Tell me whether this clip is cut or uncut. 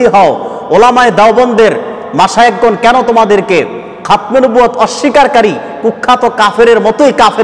uncut